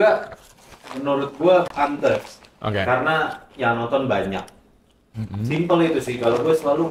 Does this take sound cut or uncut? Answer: uncut